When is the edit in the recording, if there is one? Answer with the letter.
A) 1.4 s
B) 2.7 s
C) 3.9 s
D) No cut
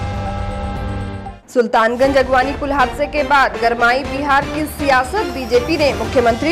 A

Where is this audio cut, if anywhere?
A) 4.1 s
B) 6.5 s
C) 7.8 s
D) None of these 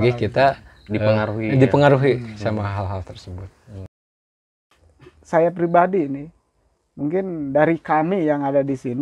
A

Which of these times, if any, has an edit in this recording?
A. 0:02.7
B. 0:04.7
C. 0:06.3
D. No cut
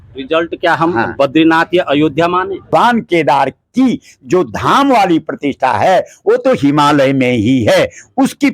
A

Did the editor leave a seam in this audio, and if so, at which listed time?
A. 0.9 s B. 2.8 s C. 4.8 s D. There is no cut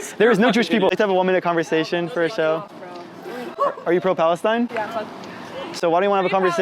A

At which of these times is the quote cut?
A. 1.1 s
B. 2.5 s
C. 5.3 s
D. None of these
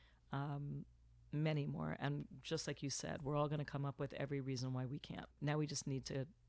C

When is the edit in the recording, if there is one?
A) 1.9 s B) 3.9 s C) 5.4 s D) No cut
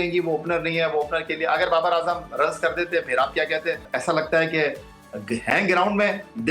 B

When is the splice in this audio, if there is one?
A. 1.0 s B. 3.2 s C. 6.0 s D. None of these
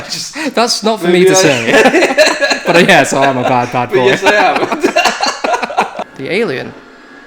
C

